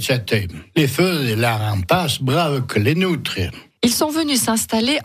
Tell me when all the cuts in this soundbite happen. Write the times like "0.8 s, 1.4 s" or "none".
none

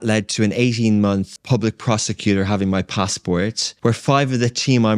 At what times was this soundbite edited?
1.4 s, 3.7 s

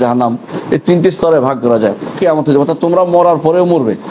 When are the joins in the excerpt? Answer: 2.1 s

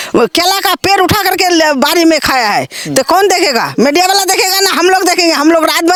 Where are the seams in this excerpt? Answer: none

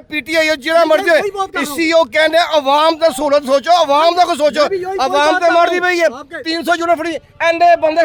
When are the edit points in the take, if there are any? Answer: none

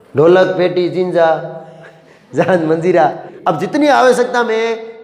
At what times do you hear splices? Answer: 3.3 s

